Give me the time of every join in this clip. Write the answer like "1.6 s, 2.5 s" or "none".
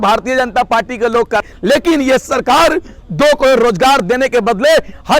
1.5 s